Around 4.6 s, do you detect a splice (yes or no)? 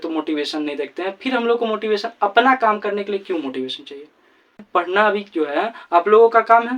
yes